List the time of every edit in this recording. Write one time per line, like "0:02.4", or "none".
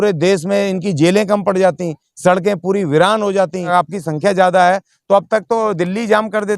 0:03.7

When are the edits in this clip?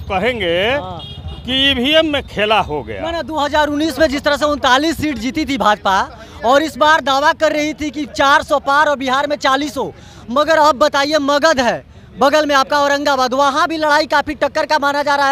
none

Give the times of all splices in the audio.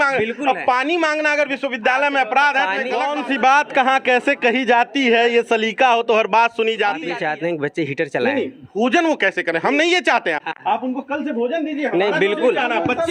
0:03.1
0:07.1

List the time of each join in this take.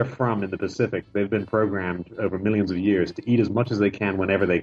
none

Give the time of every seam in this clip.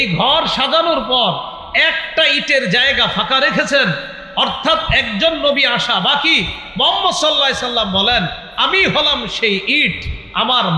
none

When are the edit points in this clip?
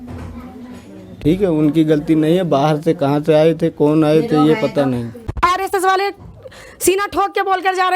0:05.3

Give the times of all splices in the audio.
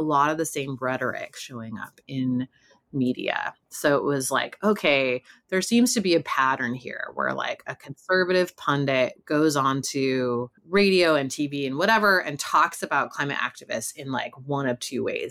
0:10.6

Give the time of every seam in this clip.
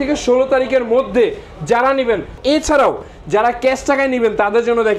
0:02.4

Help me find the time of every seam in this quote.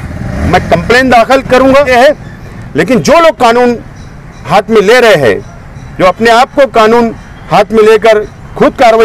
0:01.9

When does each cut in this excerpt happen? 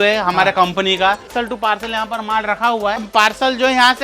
0:01.3
0:03.1

